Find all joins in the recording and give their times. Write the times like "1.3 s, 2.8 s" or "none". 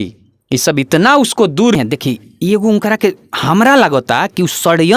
1.8 s